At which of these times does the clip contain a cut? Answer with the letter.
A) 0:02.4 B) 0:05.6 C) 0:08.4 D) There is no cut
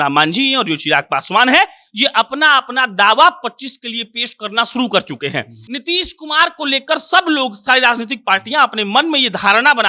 B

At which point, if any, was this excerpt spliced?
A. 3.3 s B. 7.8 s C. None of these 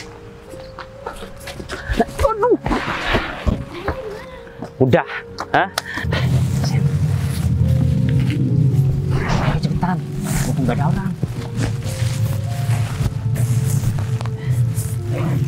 C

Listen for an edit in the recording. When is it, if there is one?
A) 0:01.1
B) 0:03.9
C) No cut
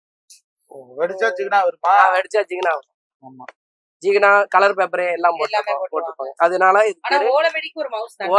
C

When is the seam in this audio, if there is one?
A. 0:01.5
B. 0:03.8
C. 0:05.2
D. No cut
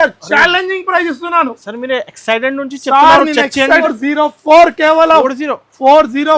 B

